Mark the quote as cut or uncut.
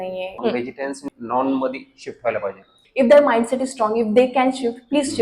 cut